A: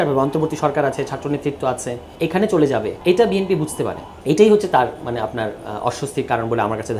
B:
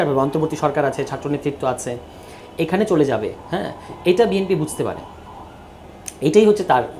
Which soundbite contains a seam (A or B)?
A